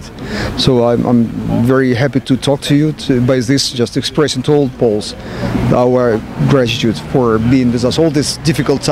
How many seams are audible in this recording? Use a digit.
0